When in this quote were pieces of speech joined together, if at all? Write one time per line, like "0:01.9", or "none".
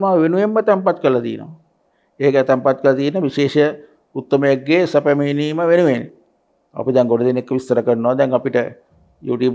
none